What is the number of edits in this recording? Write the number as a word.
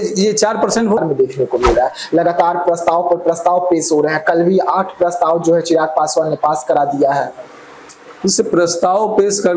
one